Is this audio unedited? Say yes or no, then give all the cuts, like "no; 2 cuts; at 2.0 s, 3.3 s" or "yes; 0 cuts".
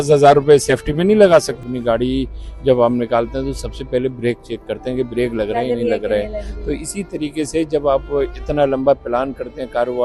no; 1 cut; at 1.6 s